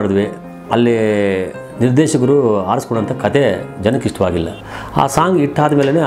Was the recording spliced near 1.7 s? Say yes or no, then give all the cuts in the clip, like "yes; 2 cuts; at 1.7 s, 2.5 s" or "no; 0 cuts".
no; 1 cut; at 4.7 s